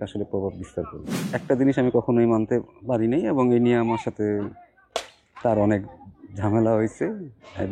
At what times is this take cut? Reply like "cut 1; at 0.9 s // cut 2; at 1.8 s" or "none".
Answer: cut 1; at 1.3 s